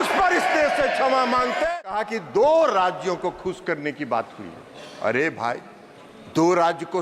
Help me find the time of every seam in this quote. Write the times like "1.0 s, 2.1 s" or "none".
1.8 s